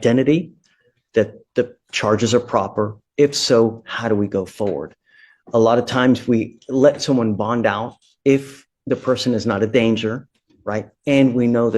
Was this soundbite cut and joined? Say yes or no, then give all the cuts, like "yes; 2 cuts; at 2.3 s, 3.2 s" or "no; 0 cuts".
no; 0 cuts